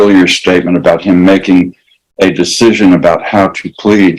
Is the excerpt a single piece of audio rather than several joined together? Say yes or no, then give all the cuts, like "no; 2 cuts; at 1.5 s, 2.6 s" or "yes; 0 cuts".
yes; 0 cuts